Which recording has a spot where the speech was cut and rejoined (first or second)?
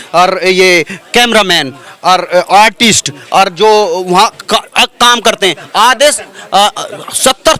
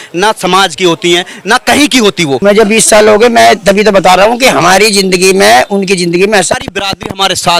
second